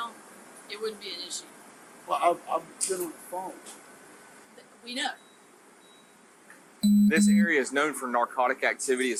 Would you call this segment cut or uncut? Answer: uncut